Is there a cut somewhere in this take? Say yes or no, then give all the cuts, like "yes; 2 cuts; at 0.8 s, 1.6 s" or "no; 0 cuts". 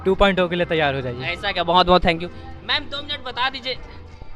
no; 0 cuts